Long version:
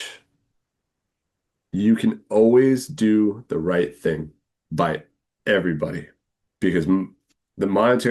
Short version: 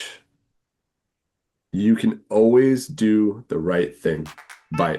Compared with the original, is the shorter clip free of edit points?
yes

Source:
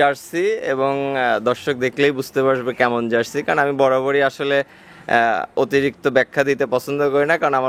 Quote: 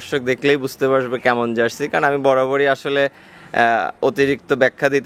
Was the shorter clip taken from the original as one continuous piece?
yes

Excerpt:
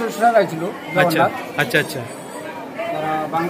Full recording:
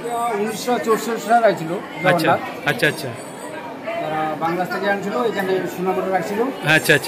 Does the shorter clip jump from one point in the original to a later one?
no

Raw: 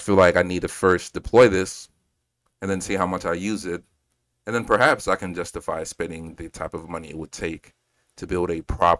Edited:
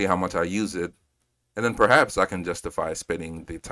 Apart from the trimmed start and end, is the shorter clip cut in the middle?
no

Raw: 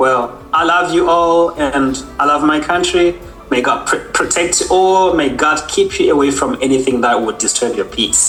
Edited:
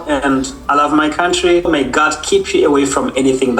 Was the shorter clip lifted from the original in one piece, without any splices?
no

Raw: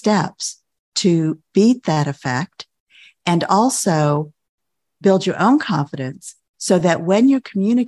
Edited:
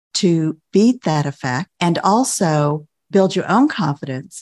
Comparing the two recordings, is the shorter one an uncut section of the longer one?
no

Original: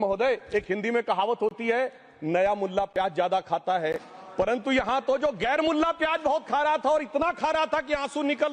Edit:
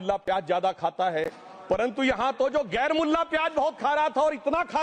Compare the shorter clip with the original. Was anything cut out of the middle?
no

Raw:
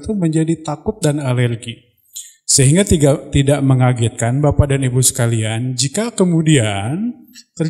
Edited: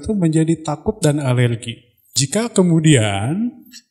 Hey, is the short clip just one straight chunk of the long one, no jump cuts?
no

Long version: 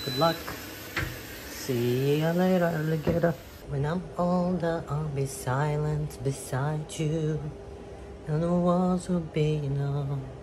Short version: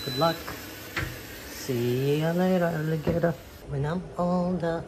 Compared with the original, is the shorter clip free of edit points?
yes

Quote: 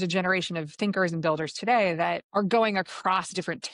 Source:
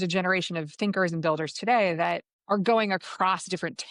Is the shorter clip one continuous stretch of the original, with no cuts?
no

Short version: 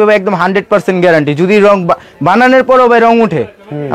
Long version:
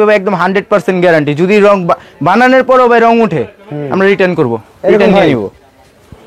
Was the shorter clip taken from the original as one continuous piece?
yes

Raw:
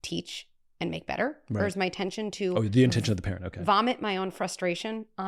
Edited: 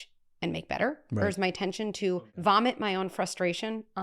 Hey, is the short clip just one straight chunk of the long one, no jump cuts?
no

